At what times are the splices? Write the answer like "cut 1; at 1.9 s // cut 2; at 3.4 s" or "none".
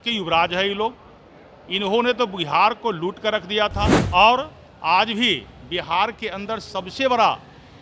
cut 1; at 4.0 s